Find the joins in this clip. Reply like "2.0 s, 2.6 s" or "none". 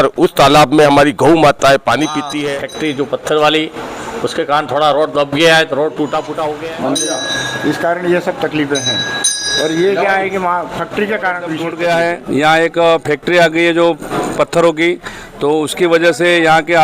2.4 s, 6.5 s, 11.7 s